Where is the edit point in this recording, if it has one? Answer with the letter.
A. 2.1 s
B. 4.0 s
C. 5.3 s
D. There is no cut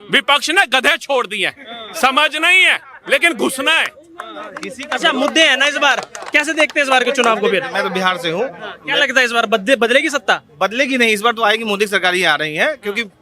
D